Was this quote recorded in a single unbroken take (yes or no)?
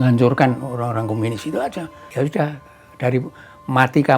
no